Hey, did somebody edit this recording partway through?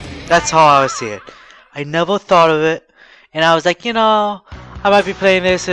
yes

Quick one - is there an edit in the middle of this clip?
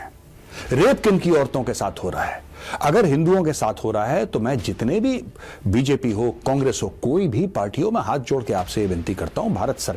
no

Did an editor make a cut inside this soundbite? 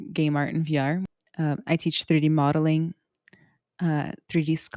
no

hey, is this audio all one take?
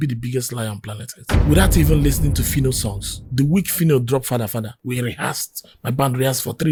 yes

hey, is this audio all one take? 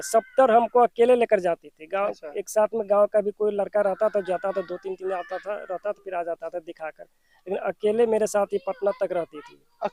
yes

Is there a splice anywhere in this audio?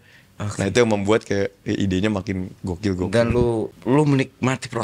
yes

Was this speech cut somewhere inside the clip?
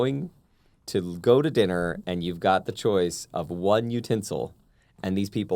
no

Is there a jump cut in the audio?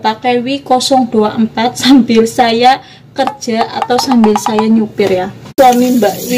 yes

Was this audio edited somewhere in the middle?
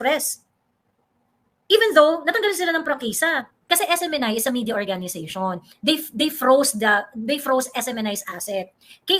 yes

